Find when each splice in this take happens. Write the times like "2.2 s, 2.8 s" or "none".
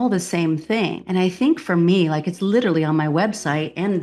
1.0 s